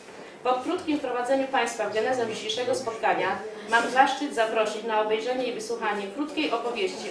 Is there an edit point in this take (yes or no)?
no